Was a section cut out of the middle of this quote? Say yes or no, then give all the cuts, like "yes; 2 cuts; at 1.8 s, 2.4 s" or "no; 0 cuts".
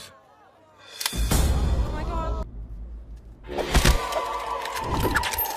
yes; 1 cut; at 2.4 s